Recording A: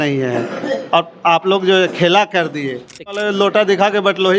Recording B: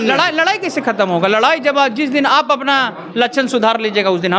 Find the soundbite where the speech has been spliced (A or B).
A